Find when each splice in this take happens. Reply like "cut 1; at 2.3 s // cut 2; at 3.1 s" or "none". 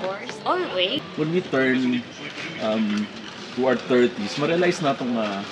cut 1; at 0.9 s